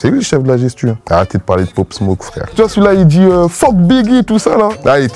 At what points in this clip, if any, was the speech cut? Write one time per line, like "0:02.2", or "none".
0:01.0